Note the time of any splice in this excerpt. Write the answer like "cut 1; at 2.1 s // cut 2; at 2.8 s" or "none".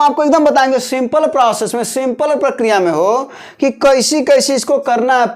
none